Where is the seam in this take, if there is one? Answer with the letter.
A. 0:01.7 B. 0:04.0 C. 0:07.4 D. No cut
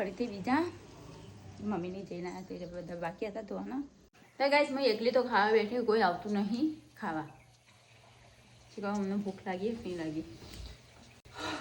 B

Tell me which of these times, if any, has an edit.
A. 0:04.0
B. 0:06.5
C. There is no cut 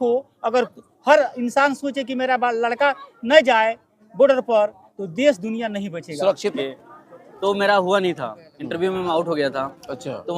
B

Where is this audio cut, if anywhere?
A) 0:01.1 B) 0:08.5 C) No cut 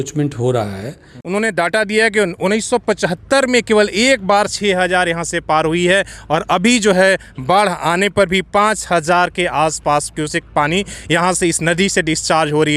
A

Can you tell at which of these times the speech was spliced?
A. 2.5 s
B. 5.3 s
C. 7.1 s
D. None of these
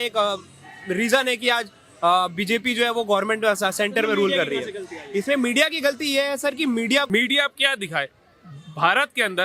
C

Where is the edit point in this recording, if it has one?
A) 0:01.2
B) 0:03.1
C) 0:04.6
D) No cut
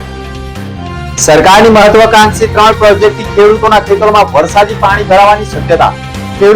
D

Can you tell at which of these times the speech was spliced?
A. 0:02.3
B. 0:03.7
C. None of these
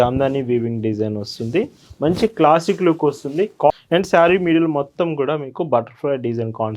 B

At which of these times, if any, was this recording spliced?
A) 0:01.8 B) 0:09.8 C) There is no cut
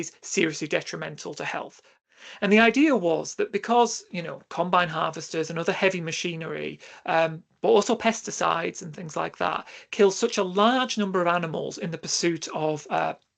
A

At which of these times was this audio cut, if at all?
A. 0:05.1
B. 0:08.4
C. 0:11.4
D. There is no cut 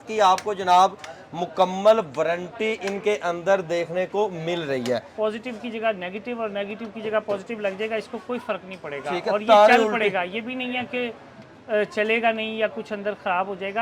A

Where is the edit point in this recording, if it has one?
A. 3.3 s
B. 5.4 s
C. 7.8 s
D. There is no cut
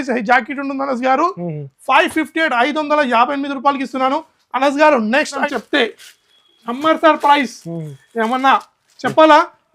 B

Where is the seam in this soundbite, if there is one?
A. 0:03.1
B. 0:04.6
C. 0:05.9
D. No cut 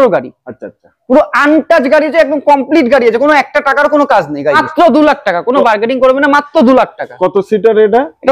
B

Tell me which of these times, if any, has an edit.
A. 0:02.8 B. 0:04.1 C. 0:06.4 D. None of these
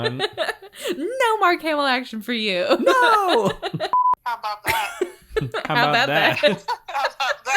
B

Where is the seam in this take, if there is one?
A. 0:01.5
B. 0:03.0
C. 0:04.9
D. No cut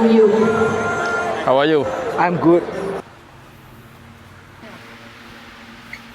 B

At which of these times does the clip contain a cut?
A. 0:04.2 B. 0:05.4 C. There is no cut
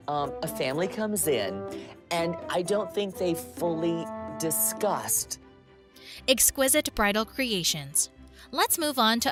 C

